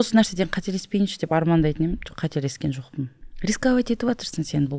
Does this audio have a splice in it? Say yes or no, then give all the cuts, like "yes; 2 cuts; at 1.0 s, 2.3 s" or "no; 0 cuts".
yes; 1 cut; at 3.2 s